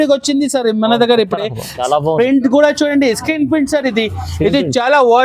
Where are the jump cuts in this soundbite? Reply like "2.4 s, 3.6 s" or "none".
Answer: 1.8 s